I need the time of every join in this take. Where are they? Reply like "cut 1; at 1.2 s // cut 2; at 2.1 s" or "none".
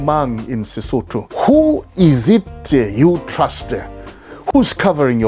cut 1; at 1.2 s